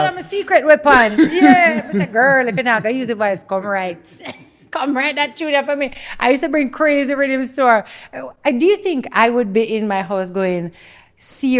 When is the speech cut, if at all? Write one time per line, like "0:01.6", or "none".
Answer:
none